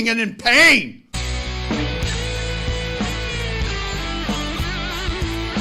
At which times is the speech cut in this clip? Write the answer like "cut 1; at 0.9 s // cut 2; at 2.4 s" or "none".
cut 1; at 1.0 s